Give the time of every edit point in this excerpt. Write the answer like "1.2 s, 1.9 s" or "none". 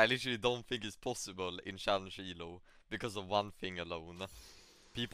none